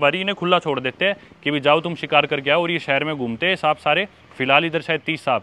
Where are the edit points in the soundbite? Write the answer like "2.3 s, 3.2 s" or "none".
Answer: none